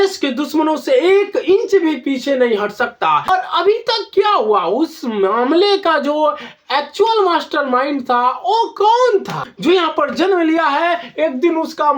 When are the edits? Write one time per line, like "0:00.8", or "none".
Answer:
0:03.3
0:09.4